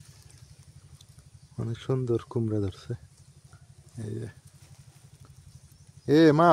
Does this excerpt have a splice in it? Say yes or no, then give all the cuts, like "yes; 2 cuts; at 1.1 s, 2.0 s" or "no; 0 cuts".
no; 0 cuts